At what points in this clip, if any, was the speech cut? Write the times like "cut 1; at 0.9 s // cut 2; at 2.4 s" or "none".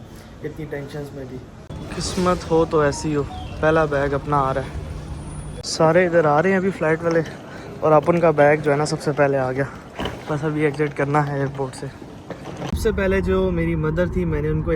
cut 1; at 12.6 s